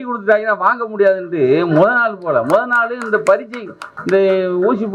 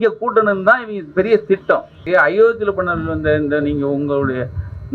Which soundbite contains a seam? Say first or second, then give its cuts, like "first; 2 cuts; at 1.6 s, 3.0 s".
second; 1 cut; at 2.0 s